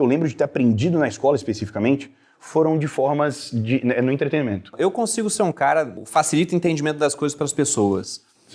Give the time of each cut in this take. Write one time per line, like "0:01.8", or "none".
0:04.7
0:06.0